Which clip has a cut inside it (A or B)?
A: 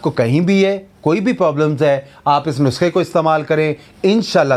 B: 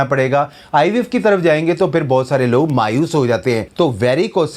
B